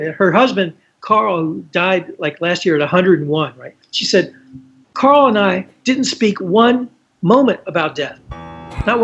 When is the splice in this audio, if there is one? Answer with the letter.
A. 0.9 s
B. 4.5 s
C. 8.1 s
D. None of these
D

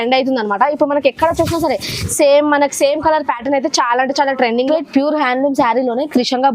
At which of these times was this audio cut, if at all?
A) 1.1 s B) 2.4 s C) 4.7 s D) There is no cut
C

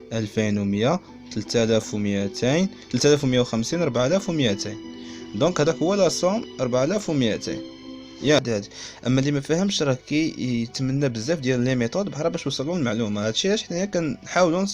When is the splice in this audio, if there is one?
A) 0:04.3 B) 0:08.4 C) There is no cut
B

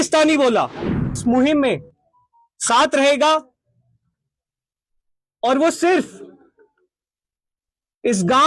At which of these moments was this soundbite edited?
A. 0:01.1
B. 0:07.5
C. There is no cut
A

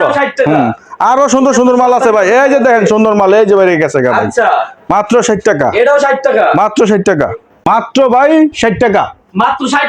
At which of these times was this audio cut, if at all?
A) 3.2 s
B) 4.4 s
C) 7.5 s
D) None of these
C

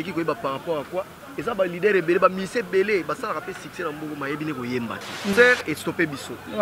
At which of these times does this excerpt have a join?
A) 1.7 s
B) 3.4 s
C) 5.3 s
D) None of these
C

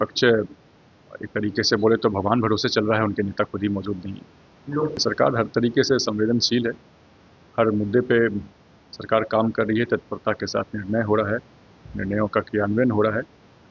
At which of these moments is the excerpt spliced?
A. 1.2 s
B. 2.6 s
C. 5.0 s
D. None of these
C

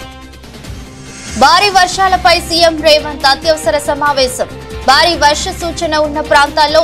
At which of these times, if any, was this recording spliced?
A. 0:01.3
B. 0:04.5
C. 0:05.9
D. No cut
A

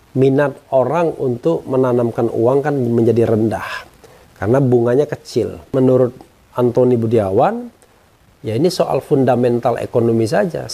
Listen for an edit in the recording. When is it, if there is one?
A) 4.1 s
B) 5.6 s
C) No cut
B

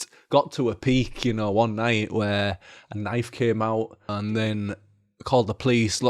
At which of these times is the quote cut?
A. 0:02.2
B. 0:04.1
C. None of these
B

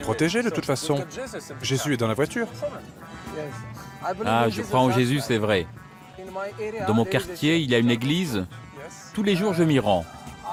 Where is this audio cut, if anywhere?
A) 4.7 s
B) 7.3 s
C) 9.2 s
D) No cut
D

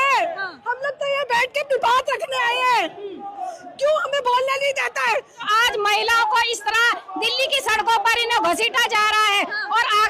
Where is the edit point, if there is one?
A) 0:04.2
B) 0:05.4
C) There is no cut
B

